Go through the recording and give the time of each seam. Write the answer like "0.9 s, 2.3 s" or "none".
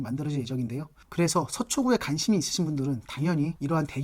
1.0 s